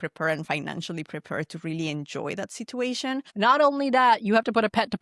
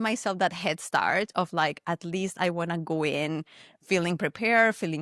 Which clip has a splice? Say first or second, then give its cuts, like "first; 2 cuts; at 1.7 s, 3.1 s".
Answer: first; 1 cut; at 3.2 s